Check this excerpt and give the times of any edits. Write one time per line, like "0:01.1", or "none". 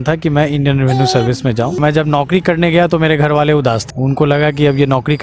0:01.8
0:03.9